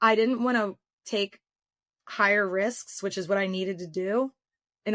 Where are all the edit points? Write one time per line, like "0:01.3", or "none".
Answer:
none